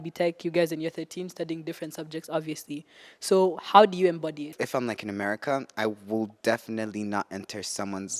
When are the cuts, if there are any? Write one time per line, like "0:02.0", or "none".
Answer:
0:04.5